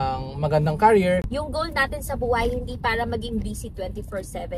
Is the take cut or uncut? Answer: cut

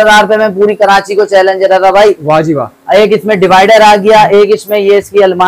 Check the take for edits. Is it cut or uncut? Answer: uncut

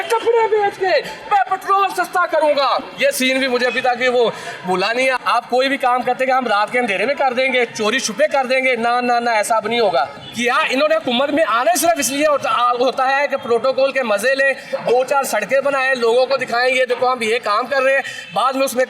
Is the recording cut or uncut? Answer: cut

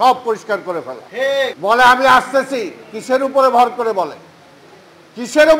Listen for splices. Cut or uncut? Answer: cut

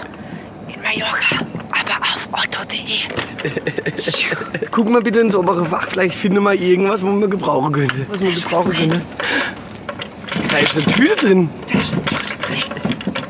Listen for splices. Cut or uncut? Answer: cut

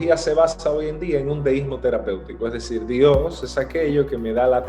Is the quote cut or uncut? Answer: uncut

